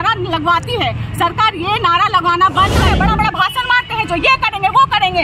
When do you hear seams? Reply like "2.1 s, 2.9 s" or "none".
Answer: 2.8 s